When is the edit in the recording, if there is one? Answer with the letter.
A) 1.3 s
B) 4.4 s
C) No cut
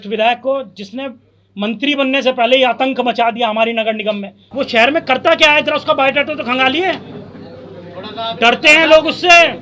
B